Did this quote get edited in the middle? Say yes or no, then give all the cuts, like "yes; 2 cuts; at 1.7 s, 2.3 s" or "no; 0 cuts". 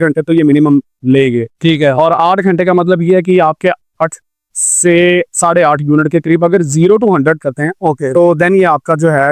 no; 0 cuts